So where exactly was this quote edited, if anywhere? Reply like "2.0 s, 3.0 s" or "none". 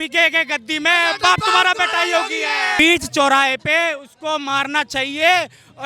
2.8 s